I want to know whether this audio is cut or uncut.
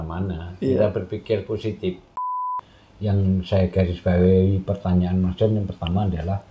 cut